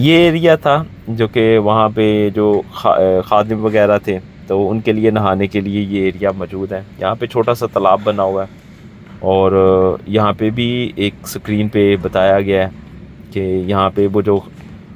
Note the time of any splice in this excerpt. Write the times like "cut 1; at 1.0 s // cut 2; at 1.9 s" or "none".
none